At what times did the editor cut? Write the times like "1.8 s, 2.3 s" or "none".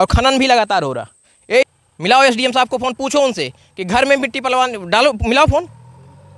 1.6 s